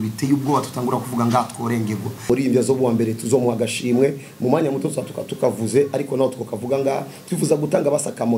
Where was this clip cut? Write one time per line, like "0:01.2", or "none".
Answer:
0:02.3